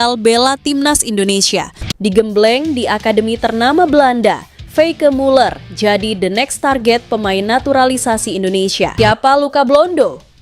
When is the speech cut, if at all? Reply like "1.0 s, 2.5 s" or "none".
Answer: 1.8 s, 8.9 s